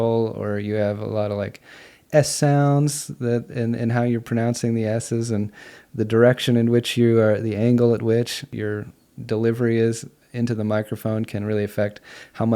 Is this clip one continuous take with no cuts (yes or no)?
no